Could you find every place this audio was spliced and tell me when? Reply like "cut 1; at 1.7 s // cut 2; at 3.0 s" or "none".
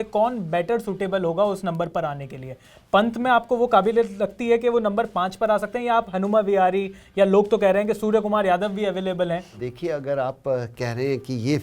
cut 1; at 9.6 s